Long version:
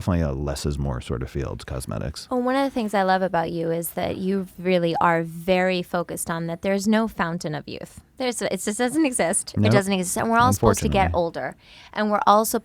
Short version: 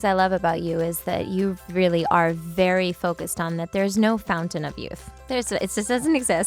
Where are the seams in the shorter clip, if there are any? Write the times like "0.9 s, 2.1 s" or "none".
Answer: none